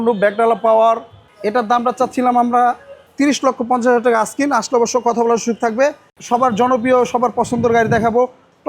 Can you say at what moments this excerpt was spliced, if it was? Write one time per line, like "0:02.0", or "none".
0:01.2
0:06.2

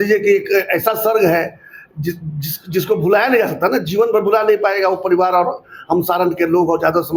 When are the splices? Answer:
none

